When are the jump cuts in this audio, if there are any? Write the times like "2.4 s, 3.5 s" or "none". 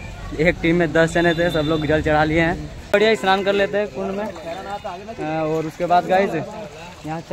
2.9 s